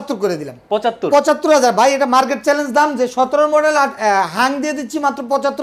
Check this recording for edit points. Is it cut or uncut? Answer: uncut